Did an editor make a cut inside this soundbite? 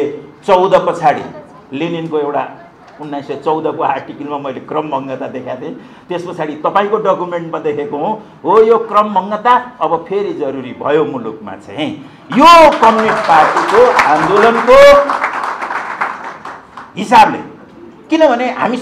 no; 0 cuts

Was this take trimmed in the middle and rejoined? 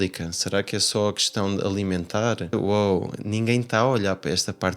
yes; 1 cut; at 2.5 s

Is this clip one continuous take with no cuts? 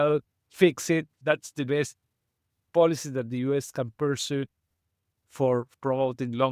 no; 2 cuts; at 1.1 s, 5.7 s

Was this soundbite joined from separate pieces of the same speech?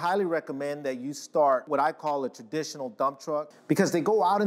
yes; 1 cut; at 3.5 s

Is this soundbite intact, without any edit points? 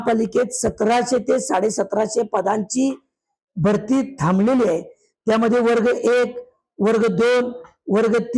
yes; 0 cuts

